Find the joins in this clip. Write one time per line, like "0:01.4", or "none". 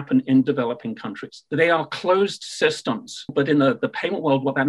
0:01.4
0:03.3